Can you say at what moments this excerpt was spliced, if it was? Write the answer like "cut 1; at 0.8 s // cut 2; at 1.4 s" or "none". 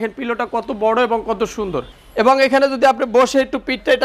cut 1; at 1.9 s